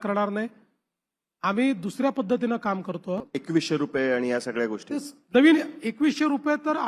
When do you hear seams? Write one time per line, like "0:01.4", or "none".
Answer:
0:03.3